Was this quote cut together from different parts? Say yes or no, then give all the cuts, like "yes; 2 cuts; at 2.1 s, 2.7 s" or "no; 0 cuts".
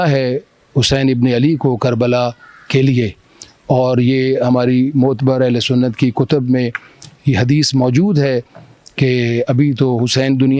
no; 0 cuts